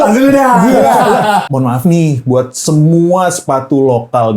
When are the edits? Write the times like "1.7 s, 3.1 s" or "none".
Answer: 1.4 s